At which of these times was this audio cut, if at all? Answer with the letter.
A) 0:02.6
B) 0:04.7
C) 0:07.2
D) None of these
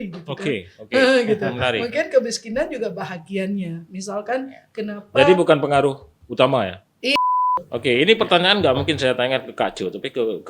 C